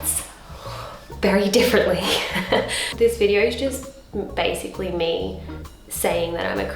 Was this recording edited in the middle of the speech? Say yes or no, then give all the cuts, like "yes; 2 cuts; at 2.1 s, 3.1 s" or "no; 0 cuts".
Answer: yes; 1 cut; at 2.9 s